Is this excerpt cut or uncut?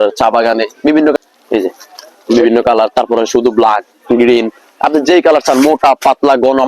cut